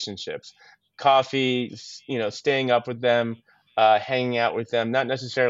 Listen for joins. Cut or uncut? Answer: uncut